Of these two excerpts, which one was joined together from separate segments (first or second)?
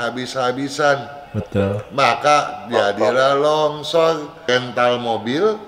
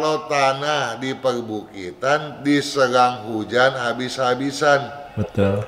first